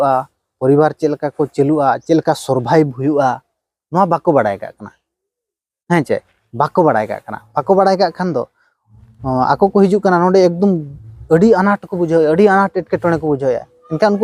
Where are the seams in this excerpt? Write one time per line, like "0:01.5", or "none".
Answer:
none